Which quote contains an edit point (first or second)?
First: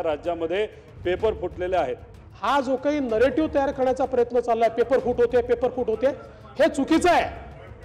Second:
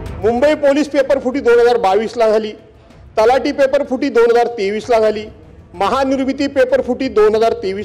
first